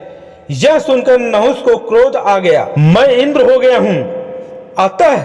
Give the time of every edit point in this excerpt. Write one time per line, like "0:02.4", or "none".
0:02.6